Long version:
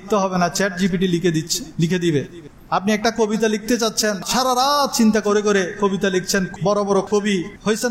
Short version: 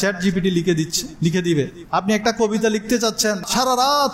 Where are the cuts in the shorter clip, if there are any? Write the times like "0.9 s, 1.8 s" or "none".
1.8 s